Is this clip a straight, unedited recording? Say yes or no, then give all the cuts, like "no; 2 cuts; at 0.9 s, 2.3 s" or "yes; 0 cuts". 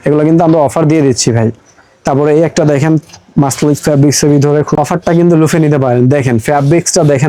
no; 1 cut; at 4.7 s